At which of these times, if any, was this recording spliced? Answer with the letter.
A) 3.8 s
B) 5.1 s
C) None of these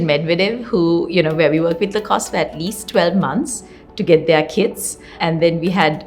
B